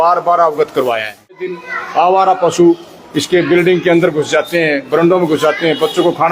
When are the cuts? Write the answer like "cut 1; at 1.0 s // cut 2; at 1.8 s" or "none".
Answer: cut 1; at 1.5 s